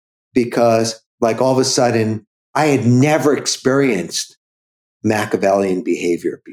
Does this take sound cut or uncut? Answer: cut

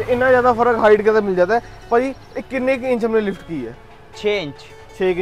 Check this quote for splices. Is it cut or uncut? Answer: uncut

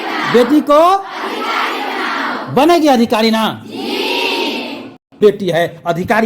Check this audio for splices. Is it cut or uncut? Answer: cut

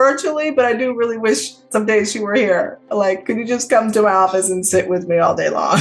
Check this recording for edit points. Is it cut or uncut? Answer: uncut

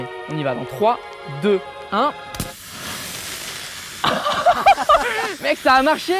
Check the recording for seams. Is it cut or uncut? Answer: uncut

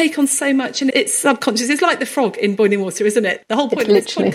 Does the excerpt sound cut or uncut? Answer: cut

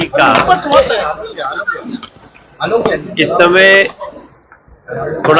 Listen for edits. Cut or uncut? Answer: uncut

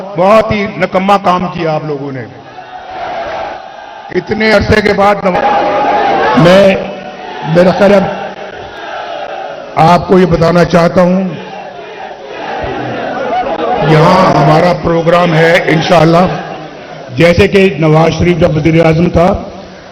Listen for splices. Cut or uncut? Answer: uncut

